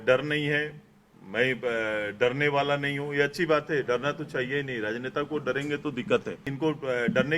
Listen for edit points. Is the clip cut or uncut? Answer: cut